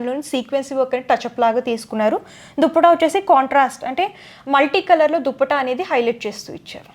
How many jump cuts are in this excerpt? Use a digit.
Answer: 0